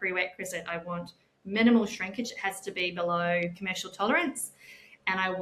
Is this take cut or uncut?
cut